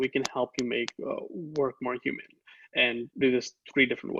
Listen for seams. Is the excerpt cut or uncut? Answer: uncut